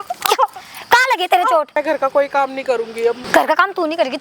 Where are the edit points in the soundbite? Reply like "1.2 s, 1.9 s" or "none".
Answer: 1.7 s, 3.2 s